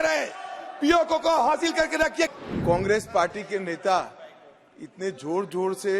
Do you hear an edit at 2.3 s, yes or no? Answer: yes